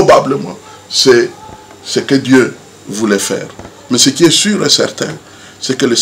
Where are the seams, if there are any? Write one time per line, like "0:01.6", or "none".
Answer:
none